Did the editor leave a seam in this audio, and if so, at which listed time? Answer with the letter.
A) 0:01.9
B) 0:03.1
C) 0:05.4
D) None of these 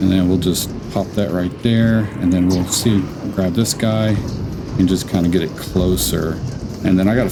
D